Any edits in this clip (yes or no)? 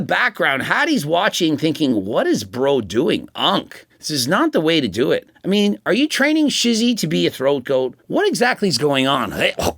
yes